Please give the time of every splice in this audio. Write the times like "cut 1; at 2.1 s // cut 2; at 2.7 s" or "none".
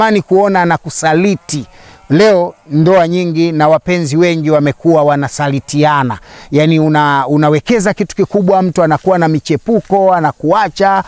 none